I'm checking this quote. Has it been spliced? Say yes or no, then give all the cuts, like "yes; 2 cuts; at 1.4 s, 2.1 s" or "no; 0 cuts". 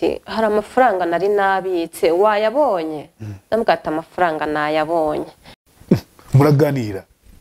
yes; 1 cut; at 5.5 s